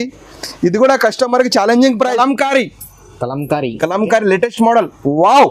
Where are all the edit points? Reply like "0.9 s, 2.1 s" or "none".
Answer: 2.1 s